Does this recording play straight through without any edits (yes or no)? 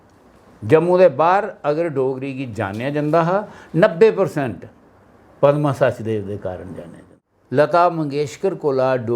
no